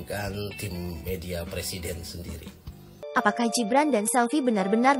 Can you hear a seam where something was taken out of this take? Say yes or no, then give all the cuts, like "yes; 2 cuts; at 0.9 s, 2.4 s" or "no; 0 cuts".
yes; 1 cut; at 3.0 s